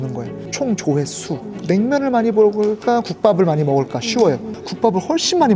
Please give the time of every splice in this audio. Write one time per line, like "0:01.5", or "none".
0:01.5